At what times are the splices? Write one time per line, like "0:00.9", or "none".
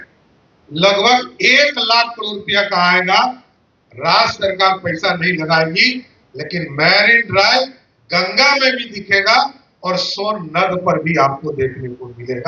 none